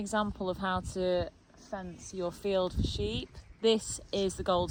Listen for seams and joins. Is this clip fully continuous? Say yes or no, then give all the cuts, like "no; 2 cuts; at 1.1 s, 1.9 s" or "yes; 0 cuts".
yes; 0 cuts